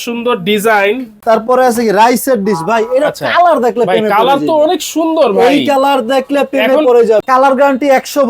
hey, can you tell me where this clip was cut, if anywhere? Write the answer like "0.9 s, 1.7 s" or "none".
1.1 s, 7.2 s